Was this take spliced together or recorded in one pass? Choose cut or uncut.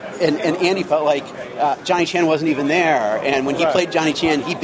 uncut